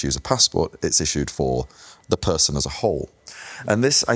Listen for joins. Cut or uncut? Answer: uncut